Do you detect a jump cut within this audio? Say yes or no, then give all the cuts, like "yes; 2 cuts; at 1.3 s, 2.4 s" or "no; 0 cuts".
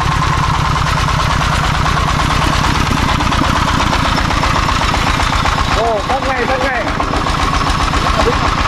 no; 0 cuts